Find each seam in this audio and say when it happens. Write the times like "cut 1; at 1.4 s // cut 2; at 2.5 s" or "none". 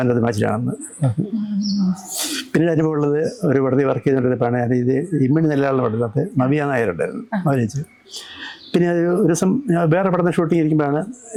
none